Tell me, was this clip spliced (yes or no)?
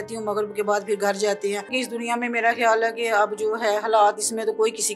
yes